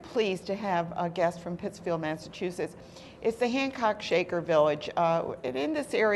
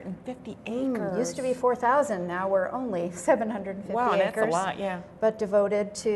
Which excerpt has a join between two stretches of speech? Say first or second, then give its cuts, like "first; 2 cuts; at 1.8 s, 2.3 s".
second; 1 cut; at 2.9 s